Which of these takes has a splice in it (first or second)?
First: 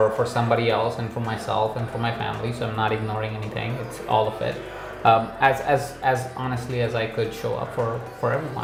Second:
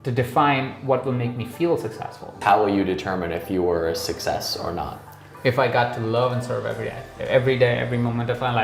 second